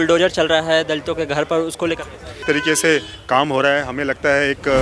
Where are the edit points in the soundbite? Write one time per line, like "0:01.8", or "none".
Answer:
0:02.4

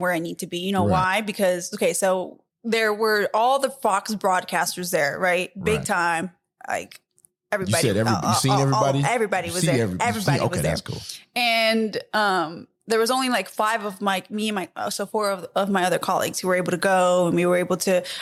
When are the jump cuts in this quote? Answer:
none

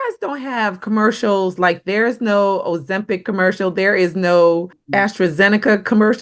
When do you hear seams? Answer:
0:04.8

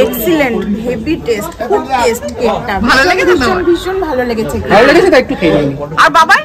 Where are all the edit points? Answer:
none

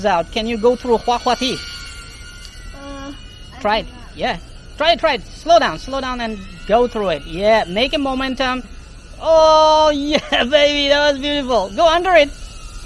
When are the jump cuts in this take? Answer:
none

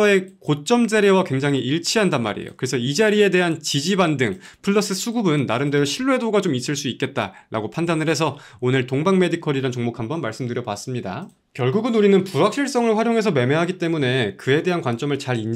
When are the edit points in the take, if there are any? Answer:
none

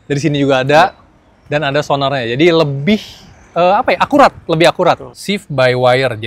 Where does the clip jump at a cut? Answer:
0:05.1

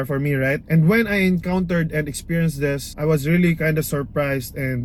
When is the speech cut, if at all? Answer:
none

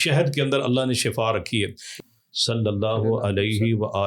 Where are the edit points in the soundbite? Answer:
0:02.1

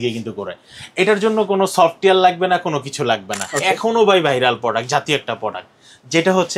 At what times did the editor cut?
0:03.3

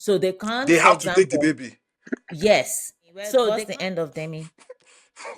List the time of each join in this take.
0:03.6

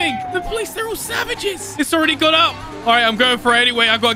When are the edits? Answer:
0:01.6

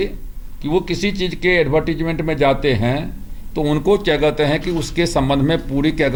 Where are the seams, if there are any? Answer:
none

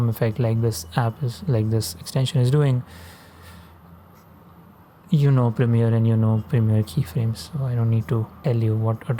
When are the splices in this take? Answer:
none

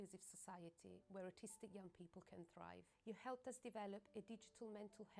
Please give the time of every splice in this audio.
0:03.8

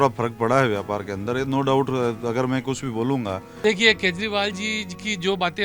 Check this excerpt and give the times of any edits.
0:03.5

